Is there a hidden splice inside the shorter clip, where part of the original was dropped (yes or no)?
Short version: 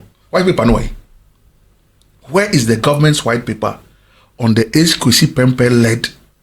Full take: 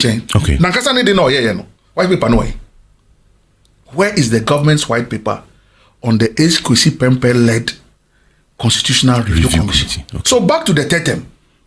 no